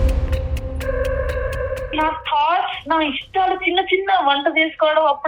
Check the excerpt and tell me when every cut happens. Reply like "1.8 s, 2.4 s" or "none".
1.9 s